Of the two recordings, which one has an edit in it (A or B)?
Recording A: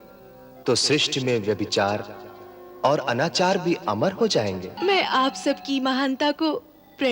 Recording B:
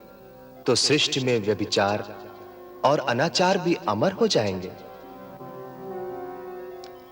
A